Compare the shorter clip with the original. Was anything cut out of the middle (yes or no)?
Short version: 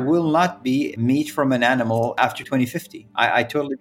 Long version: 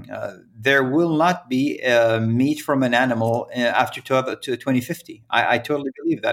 yes